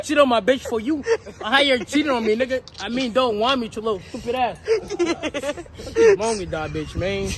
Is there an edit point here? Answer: no; 0 cuts

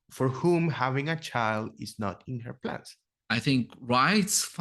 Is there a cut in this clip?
yes; 1 cut; at 3.1 s

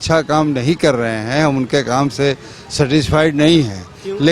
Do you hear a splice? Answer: no; 0 cuts

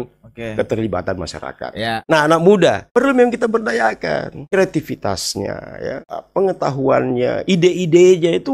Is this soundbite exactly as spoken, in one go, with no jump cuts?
no; 4 cuts; at 2.0 s, 2.8 s, 4.4 s, 6.1 s

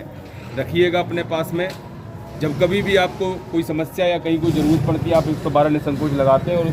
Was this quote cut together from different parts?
no; 0 cuts

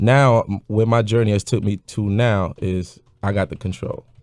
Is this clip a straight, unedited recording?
no; 1 cut; at 1.7 s

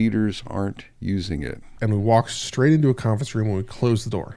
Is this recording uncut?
no; 1 cut; at 1.7 s

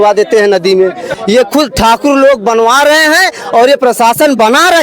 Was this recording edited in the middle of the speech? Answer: yes; 1 cut; at 1.1 s

